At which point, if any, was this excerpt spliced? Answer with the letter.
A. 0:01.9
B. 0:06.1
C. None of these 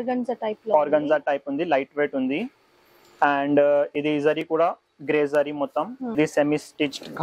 B